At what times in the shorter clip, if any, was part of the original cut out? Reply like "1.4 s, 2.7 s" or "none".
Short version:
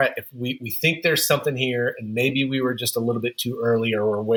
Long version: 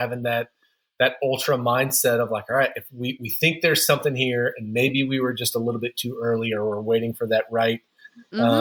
none

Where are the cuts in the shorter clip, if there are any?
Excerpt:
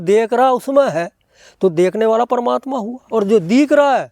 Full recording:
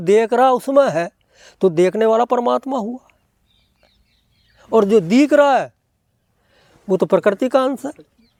3.0 s

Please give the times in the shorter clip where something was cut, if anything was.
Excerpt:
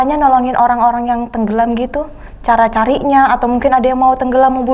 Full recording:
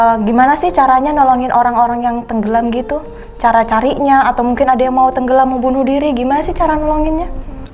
none

